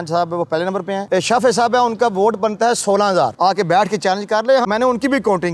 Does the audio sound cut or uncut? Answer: cut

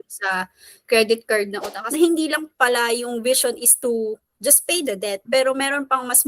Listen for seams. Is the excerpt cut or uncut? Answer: cut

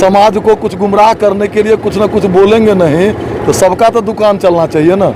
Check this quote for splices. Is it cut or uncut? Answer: uncut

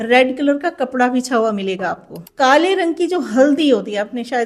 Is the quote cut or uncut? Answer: cut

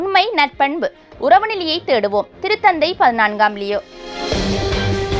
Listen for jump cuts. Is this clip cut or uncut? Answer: cut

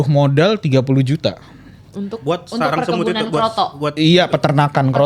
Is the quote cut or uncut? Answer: uncut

